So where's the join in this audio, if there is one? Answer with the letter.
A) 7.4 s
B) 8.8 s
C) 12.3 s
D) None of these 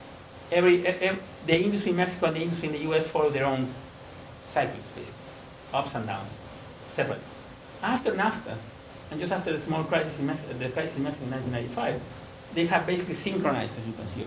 D